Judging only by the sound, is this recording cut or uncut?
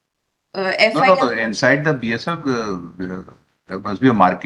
uncut